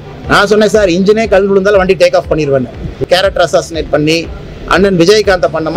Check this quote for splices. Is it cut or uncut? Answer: cut